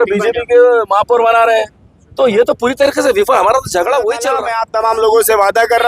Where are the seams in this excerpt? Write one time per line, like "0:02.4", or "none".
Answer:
0:04.5